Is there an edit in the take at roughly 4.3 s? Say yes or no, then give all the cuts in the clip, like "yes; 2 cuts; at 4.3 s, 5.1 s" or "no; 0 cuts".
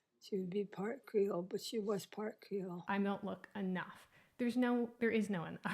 no; 1 cut; at 2.8 s